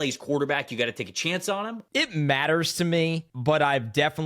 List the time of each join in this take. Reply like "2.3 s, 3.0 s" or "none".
1.7 s, 3.3 s